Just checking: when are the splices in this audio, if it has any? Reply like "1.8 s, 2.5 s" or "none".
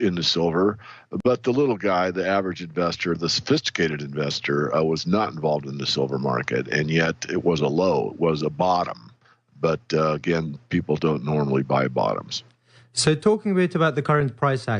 9.0 s